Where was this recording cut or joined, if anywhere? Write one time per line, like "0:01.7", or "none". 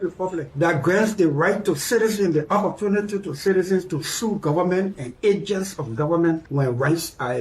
0:06.5